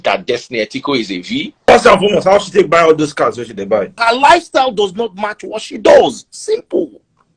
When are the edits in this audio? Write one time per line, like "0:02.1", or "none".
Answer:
0:01.7
0:04.0